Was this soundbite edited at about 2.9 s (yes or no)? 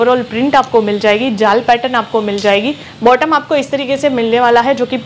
yes